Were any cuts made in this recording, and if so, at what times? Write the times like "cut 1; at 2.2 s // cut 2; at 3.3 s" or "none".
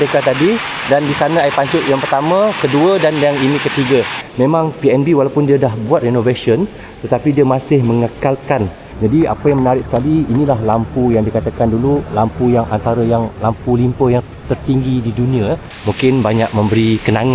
cut 1; at 4.2 s // cut 2; at 8.8 s // cut 3; at 15.7 s